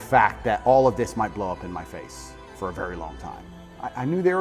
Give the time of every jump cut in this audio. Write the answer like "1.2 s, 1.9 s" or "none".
3.5 s